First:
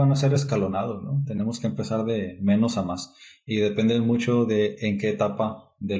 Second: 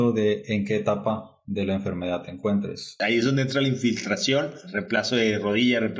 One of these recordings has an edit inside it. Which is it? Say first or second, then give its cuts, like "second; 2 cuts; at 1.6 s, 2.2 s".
second; 2 cuts; at 2.8 s, 4.7 s